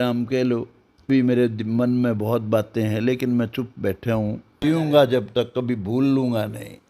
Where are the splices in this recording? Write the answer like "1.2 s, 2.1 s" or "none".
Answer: 1.1 s, 4.5 s